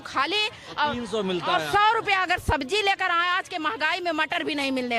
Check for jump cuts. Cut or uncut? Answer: uncut